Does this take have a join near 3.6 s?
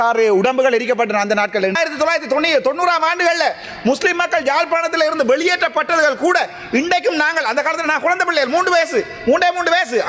no; 1 cut; at 1.7 s

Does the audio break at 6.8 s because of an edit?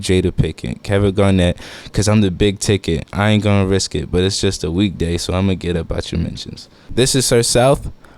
yes; 1 cut; at 6.8 s

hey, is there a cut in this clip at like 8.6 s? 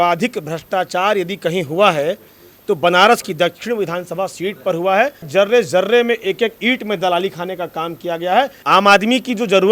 yes; 2 cuts; at 5.3 s, 8.6 s

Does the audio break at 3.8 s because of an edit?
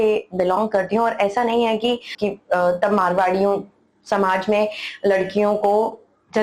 no; 1 cut; at 2.1 s

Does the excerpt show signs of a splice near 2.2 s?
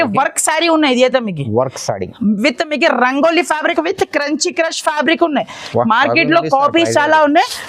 no; 1 cut; at 3.6 s

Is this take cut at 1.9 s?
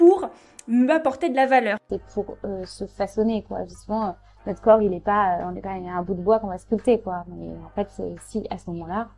yes; 1 cut; at 1.9 s

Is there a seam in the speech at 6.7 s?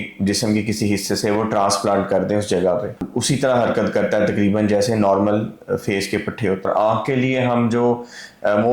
yes; 2 cuts; at 3.0 s, 6.7 s

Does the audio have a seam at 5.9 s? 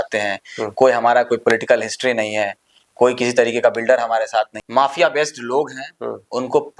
no; 1 cut; at 4.6 s

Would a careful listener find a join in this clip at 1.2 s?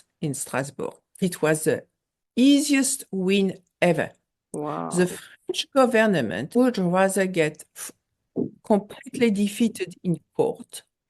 yes; 2 cuts; at 1.2 s, 6.5 s

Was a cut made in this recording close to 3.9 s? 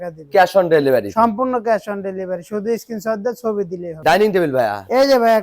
yes; 1 cut; at 3.9 s

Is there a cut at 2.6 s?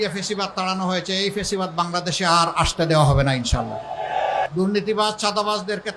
no; 1 cut; at 4.5 s

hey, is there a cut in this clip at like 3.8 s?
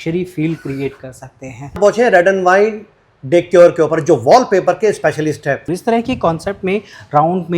no; 2 cuts; at 1.8 s, 5.7 s

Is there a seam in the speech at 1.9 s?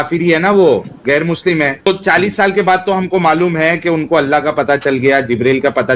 yes; 1 cut; at 1.9 s

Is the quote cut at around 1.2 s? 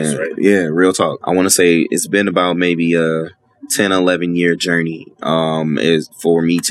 yes; 1 cut; at 1.2 s

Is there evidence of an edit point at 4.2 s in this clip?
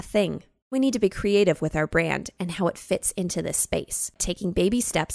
yes; 2 cuts; at 0.7 s, 4.2 s

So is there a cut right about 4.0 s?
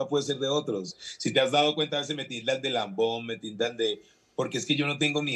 no; 1 cut; at 0.9 s

